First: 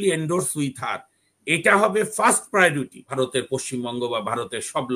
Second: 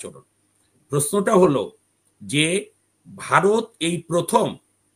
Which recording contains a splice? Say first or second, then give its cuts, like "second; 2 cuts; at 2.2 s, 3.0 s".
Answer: first; 1 cut; at 3.0 s